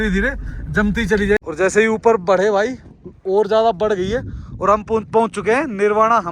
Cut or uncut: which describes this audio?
cut